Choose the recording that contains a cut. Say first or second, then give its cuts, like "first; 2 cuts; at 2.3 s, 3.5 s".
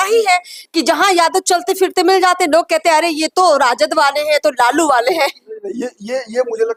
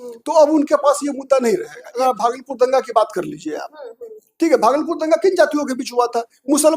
second; 1 cut; at 1.9 s